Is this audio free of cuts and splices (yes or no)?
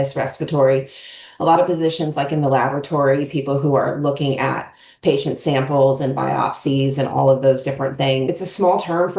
yes